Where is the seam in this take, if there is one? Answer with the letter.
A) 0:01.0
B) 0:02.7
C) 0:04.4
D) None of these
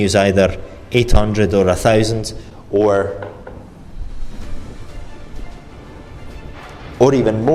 D